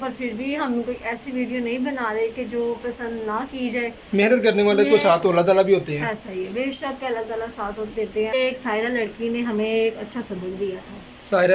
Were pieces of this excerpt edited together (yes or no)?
yes